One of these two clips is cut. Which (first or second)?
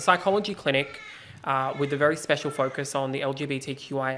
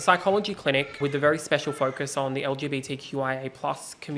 second